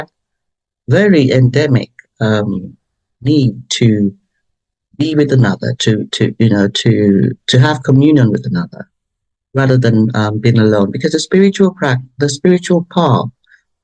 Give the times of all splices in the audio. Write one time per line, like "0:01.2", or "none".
none

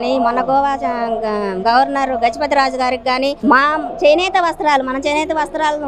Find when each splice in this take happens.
none

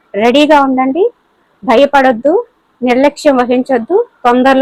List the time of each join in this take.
none

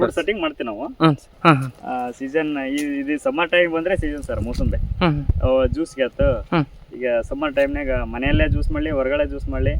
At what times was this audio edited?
0:01.3

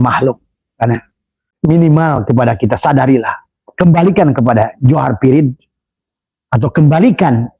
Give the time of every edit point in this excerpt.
0:01.5

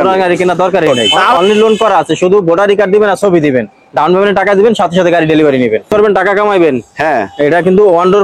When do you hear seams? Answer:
0:01.4
0:05.9

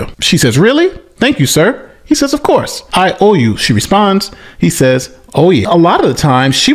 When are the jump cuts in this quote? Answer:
0:05.6

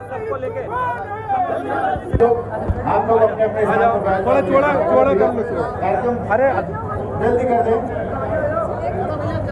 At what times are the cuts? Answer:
0:02.2

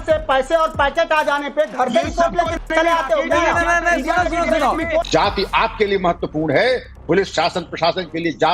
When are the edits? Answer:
0:03.7
0:05.1

